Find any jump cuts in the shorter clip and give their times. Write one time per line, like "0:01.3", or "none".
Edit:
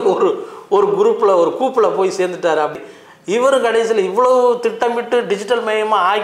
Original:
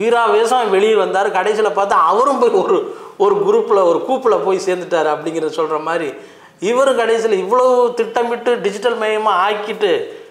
0:02.8